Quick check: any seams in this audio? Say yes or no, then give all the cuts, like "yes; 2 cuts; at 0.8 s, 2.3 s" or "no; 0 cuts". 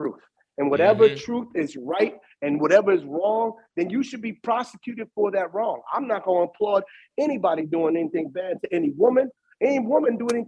no; 0 cuts